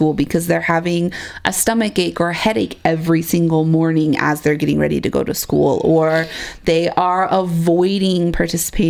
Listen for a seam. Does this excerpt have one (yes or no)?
no